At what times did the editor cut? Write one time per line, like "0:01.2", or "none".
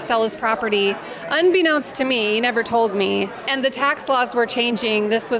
none